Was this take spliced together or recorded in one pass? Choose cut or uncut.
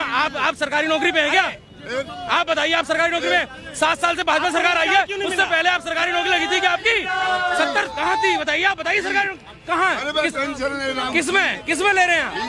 uncut